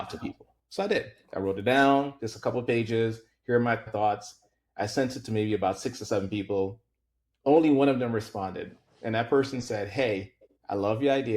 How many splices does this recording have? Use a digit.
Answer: 1